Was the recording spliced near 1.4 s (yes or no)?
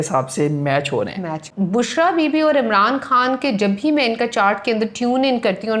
yes